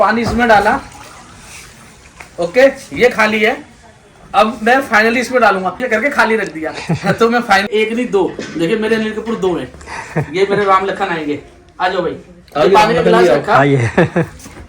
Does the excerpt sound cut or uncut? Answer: cut